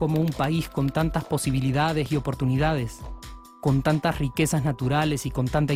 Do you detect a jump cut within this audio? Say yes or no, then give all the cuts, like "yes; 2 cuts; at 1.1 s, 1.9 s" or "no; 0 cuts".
no; 0 cuts